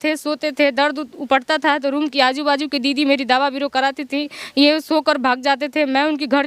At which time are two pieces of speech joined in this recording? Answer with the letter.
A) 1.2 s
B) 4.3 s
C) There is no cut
C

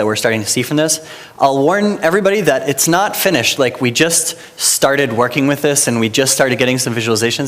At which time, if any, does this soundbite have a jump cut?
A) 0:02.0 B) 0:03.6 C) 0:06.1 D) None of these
C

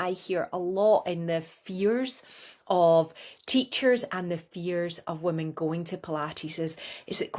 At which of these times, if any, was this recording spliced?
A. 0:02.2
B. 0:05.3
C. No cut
C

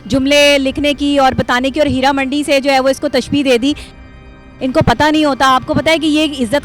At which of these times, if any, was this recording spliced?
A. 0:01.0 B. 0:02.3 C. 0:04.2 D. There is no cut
C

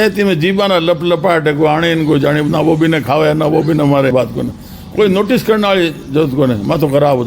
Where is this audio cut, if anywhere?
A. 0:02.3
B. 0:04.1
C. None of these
B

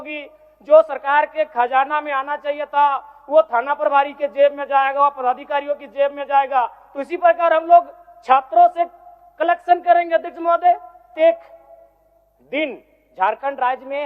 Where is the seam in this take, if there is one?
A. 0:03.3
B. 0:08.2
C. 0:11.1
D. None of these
C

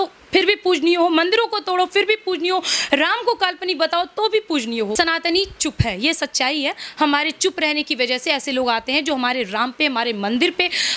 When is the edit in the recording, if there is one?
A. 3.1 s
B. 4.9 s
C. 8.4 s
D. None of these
B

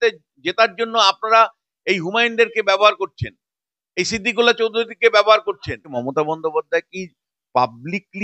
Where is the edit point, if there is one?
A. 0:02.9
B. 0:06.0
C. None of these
B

